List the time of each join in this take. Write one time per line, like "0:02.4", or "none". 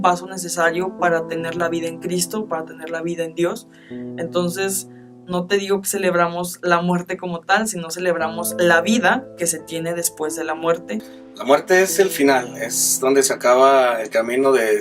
0:12.9